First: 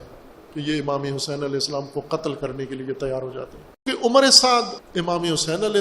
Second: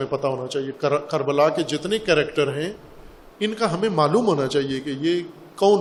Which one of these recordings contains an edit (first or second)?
first